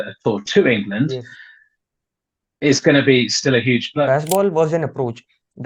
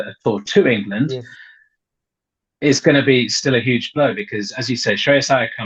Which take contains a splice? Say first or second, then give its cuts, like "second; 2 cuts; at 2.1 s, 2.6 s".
first; 1 cut; at 4.1 s